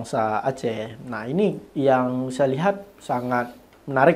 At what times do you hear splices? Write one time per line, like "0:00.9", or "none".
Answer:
none

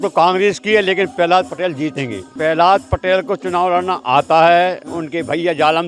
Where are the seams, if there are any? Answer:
0:02.3

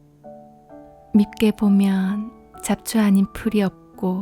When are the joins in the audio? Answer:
0:01.1

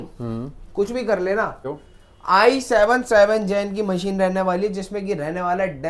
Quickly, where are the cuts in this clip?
0:01.7

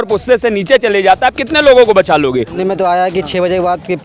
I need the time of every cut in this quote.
0:02.5

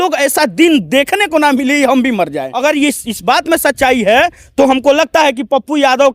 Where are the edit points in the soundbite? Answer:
0:02.4

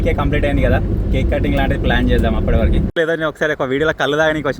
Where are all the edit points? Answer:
0:03.0

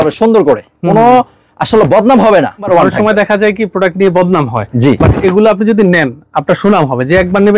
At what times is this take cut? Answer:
0:02.7

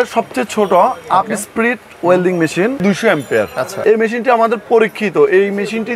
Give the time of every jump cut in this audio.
0:03.2

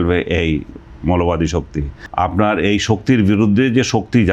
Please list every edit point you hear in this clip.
0:02.0

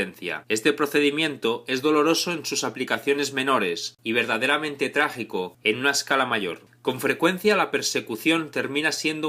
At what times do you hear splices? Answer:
none

